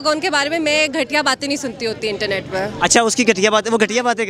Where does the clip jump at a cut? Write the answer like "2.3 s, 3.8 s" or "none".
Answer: none